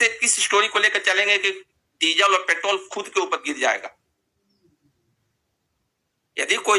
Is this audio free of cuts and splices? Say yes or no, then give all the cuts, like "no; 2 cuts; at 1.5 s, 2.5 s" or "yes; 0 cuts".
yes; 0 cuts